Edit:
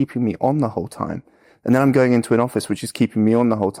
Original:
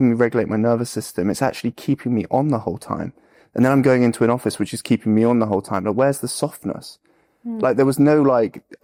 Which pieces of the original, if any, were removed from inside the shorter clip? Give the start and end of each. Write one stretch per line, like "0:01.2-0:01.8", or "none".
none